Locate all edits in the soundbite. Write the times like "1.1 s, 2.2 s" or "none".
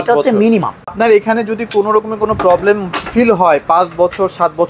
0.9 s